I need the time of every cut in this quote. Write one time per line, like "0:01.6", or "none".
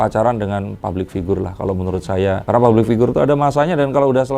0:02.4